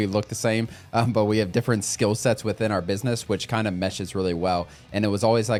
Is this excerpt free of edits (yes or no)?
yes